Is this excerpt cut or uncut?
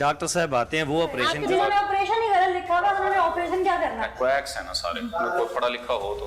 cut